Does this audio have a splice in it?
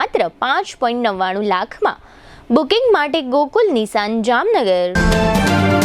yes; 1 cut; at 4.9 s

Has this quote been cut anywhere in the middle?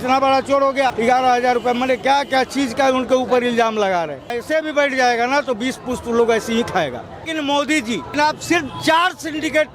yes; 4 cuts; at 0.9 s, 4.4 s, 7.3 s, 8.1 s

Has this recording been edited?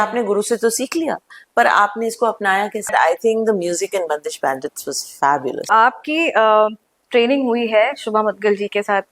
yes; 2 cuts; at 2.9 s, 5.7 s

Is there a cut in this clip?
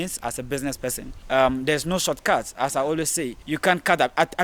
yes; 2 cuts; at 1.1 s, 3.4 s

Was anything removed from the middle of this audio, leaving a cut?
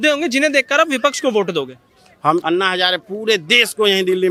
no; 0 cuts

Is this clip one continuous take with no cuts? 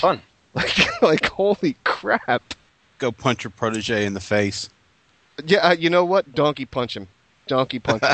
no; 1 cut; at 2.9 s

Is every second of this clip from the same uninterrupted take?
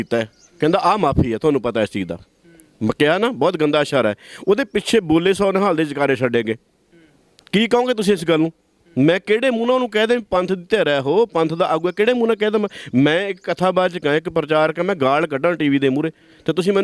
yes; 0 cuts

